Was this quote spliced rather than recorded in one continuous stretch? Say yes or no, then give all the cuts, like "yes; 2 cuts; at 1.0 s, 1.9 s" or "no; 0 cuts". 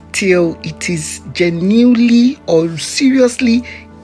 no; 0 cuts